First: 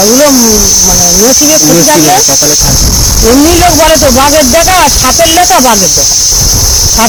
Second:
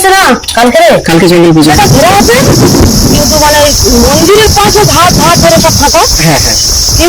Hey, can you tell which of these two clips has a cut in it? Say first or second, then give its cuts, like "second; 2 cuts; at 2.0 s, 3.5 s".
second; 1 cut; at 1.5 s